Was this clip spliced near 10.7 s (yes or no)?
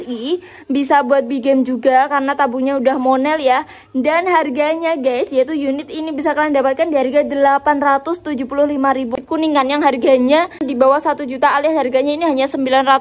yes